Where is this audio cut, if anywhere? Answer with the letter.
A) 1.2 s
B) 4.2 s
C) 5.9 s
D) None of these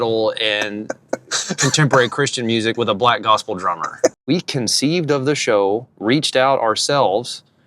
B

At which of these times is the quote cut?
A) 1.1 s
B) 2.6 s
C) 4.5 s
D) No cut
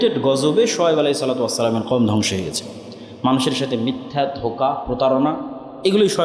D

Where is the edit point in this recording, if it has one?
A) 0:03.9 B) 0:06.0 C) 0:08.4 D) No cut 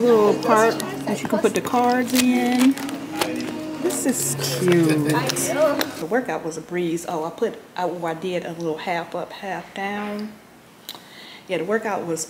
B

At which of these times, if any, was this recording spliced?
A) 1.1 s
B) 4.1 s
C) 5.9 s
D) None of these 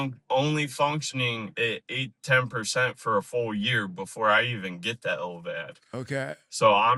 D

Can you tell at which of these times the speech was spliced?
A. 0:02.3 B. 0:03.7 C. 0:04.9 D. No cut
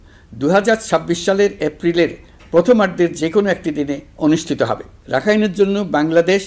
C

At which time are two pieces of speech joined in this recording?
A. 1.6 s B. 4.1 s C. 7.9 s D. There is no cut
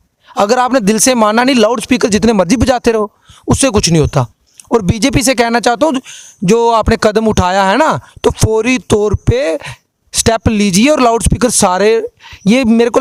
D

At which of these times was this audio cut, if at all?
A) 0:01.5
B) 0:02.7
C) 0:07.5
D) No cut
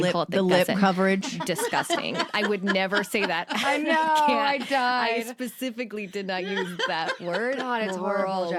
D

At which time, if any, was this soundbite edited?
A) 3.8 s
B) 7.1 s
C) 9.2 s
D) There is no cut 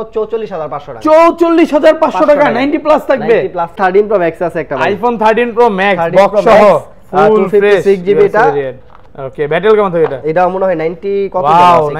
A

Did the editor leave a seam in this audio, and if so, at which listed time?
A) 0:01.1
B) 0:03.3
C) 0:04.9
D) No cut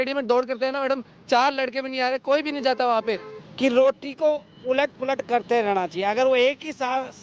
B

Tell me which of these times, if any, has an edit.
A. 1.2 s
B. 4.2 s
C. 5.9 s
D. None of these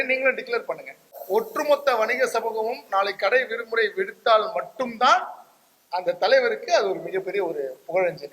A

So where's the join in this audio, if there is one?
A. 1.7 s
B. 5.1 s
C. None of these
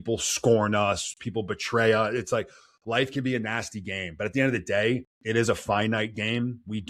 B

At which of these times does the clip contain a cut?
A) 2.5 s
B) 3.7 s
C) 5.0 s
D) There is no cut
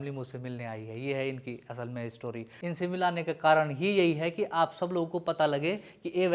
A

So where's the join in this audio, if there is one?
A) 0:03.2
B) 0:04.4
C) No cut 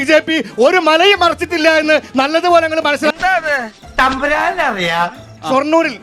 C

